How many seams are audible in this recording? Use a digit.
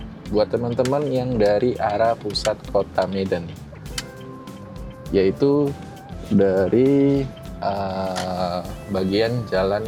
0